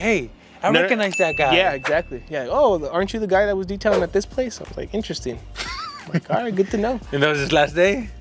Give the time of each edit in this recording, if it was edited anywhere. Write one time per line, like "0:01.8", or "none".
none